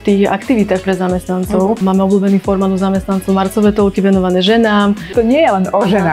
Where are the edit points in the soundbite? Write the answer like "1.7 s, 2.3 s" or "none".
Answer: 1.8 s, 5.1 s